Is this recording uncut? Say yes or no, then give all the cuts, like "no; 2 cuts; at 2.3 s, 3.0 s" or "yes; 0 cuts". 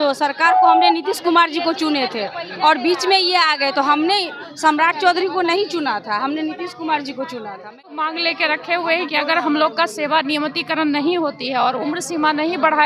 no; 1 cut; at 8.0 s